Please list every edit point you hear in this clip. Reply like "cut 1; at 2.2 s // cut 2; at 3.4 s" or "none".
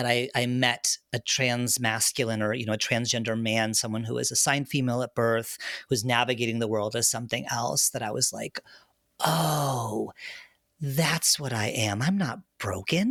none

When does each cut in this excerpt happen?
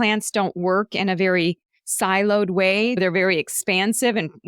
cut 1; at 3.0 s

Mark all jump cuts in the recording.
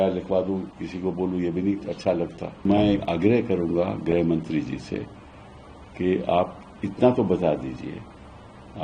cut 1; at 2.6 s

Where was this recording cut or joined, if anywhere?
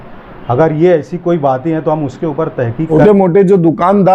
cut 1; at 2.9 s

